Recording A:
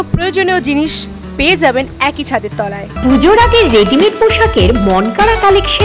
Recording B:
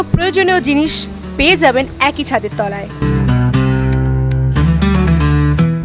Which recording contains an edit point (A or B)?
A